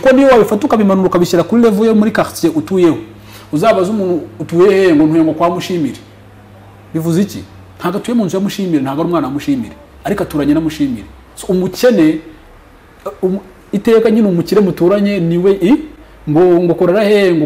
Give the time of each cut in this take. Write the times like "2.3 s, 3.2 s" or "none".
none